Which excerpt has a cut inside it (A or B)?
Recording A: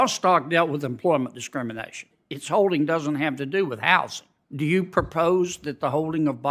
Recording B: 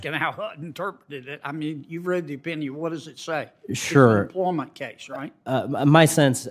A